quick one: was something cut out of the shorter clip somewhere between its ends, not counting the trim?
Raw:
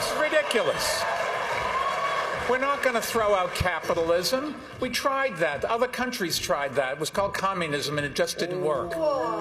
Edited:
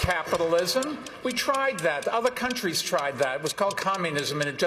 no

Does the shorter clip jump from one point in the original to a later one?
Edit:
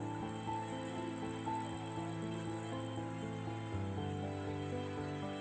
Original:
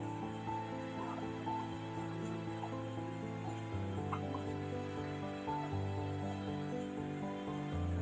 no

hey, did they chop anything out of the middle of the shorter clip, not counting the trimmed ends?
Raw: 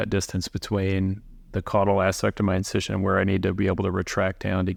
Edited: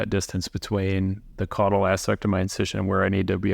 yes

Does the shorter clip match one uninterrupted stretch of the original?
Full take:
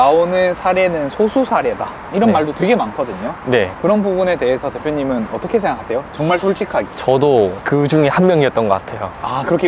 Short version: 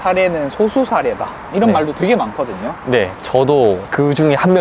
no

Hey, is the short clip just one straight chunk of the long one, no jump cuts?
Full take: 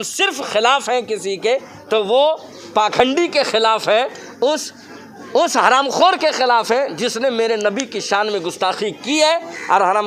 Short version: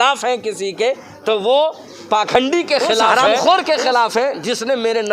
no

